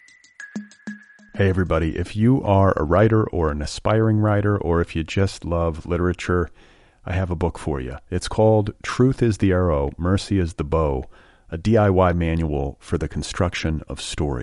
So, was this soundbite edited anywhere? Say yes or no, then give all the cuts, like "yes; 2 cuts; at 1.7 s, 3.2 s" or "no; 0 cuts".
yes; 1 cut; at 0.9 s